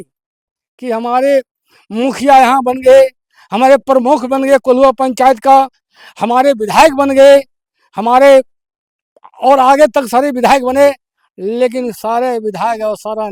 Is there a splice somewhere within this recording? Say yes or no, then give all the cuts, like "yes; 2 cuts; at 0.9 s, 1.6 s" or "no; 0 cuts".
no; 0 cuts